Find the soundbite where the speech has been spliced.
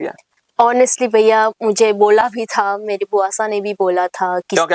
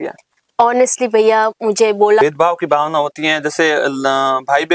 second; 1 cut; at 2.2 s

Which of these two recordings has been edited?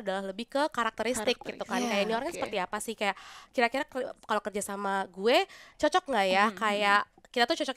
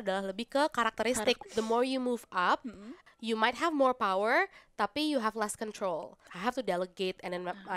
second; 3 cuts; at 1.4 s, 3.0 s, 6.3 s

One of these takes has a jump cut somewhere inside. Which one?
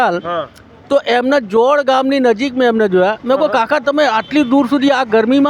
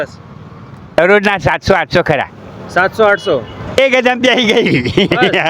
second; 2 cuts; at 1.0 s, 3.8 s

